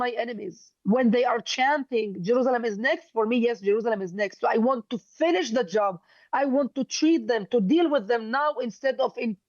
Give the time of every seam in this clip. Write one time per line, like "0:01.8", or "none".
none

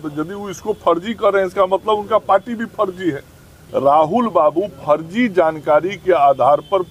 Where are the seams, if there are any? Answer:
0:03.6

